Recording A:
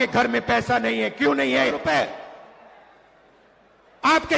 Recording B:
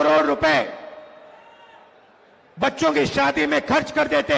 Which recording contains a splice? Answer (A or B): A